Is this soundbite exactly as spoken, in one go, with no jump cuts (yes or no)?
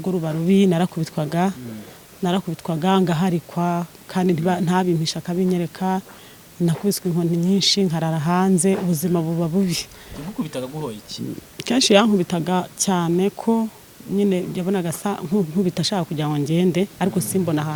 yes